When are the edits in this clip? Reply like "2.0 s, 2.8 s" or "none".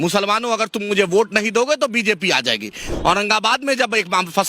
2.9 s